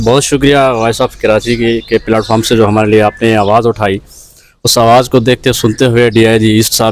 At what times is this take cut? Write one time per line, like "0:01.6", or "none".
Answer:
none